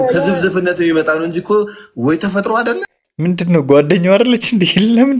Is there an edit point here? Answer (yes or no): no